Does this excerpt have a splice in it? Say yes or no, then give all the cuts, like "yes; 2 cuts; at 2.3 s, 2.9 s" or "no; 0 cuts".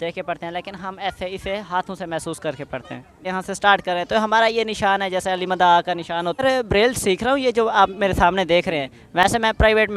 yes; 2 cuts; at 3.2 s, 6.4 s